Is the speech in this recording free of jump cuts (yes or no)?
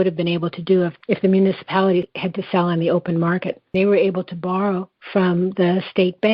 no